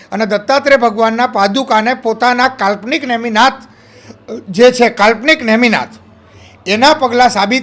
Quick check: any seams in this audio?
no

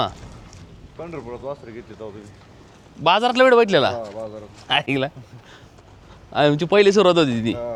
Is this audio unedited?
yes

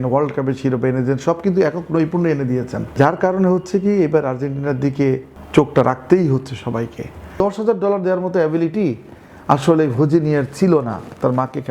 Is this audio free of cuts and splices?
no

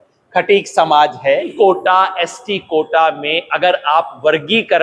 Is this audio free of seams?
no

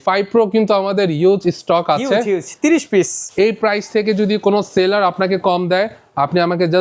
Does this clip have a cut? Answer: yes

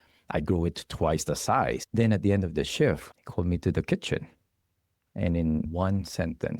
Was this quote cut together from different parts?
yes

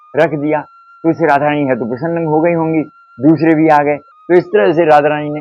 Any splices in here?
no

